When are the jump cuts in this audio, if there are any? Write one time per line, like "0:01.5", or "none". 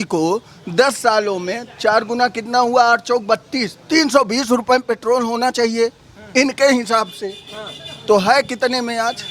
none